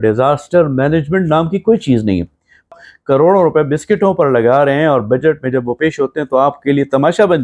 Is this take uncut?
no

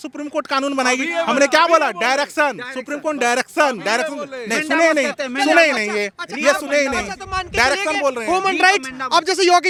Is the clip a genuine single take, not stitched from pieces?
yes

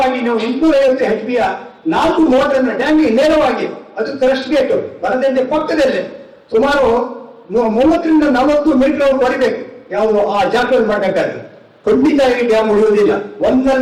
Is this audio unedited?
yes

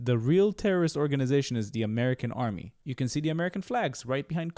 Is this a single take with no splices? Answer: no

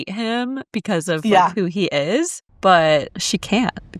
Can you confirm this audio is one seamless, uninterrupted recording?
no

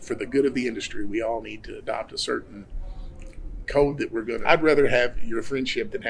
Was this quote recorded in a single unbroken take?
no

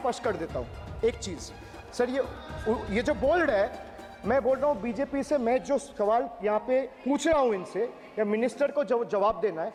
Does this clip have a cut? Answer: no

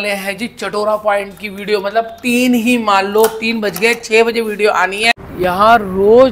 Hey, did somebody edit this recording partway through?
yes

